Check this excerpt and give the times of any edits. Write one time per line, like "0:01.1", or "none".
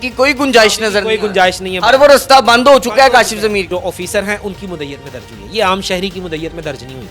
0:03.7